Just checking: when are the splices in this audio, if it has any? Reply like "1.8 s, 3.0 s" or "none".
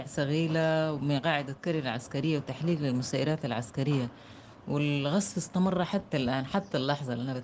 none